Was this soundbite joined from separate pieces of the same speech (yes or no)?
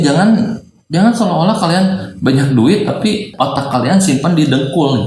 yes